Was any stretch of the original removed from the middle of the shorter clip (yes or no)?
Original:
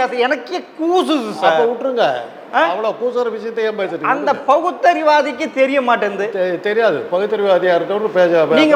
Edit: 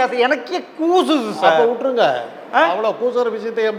no